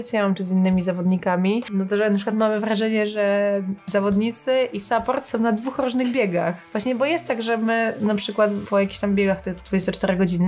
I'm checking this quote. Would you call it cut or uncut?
cut